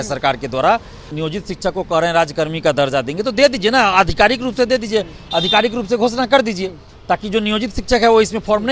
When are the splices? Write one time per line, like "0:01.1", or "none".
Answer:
0:01.0